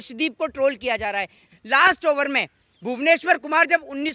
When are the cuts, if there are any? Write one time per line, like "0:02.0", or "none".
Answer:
0:01.4